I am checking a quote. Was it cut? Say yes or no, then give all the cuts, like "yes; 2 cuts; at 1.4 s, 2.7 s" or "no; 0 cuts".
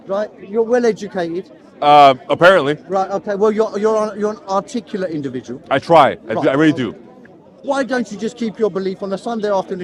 no; 0 cuts